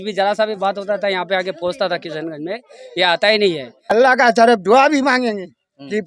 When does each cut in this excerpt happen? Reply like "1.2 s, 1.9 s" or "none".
3.9 s